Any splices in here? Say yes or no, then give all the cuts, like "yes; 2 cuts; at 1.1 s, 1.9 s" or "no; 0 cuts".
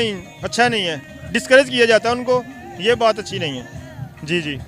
no; 0 cuts